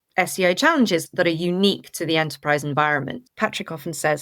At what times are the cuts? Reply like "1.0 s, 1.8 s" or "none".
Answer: 1.1 s, 3.2 s